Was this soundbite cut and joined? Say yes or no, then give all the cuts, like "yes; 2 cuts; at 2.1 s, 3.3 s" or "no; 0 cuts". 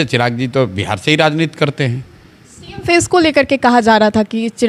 no; 0 cuts